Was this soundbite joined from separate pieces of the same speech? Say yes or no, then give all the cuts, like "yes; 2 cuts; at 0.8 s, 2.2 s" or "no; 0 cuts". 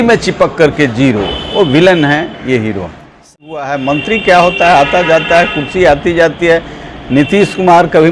yes; 1 cut; at 3.3 s